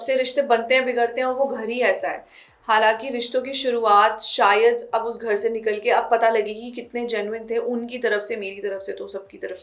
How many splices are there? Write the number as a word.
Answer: zero